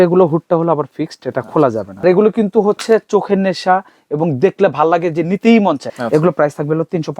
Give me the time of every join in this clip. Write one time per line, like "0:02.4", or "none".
0:02.0
0:05.9